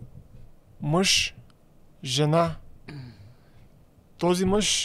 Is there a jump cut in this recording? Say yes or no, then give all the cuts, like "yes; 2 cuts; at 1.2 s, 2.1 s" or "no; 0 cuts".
no; 0 cuts